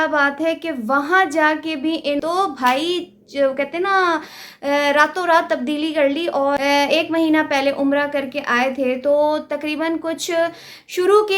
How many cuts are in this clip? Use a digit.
2